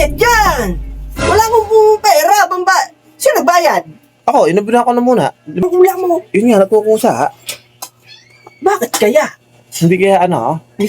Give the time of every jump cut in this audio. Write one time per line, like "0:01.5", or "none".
0:05.6